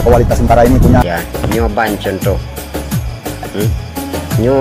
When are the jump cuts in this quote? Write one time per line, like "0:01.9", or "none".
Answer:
0:01.0